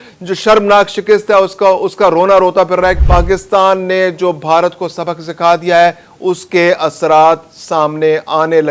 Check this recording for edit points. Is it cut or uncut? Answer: cut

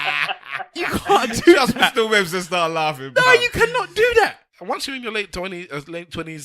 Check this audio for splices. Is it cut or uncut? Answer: cut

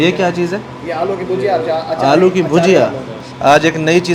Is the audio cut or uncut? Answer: uncut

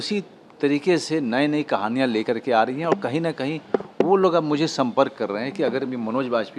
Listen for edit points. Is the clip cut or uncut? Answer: uncut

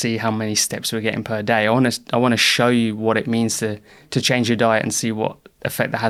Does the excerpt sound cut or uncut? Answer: uncut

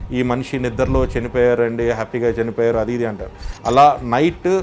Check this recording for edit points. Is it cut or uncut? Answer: uncut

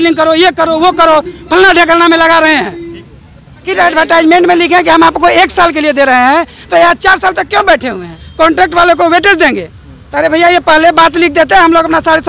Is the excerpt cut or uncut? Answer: cut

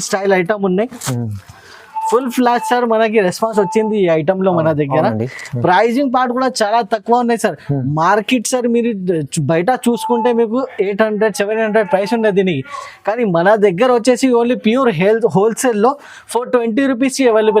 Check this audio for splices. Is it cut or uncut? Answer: uncut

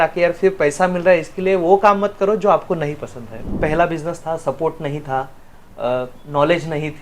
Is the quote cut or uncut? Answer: cut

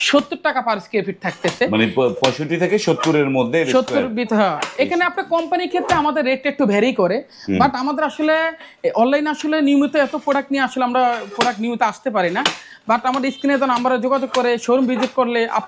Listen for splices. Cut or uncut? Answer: uncut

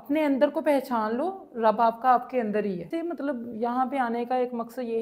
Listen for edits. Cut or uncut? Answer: cut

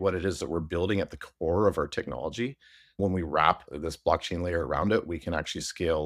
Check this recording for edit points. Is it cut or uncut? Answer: cut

